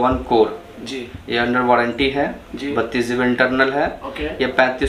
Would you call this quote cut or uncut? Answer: uncut